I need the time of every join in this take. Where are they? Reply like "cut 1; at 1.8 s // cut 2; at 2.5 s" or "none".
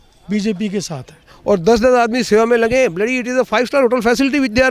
cut 1; at 1.3 s